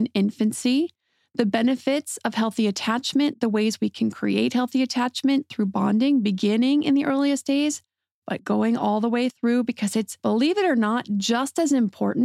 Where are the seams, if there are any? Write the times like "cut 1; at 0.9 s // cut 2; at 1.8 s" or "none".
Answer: none